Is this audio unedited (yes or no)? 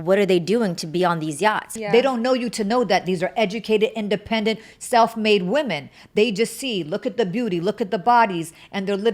no